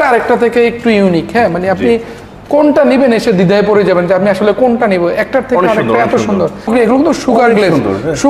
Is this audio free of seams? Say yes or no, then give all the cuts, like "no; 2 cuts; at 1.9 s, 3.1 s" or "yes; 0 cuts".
no; 1 cut; at 6.7 s